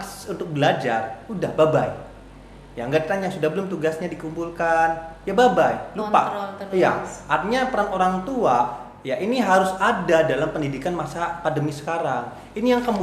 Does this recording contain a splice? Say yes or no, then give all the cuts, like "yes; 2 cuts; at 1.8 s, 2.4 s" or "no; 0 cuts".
no; 0 cuts